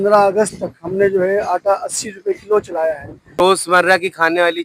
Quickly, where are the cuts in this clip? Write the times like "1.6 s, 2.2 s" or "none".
3.6 s

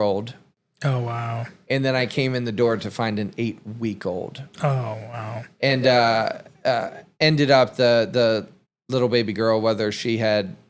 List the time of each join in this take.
none

